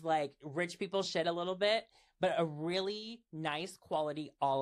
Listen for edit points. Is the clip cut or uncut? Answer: uncut